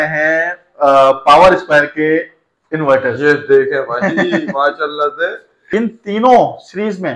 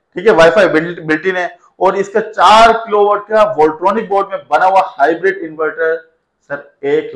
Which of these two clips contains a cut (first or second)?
first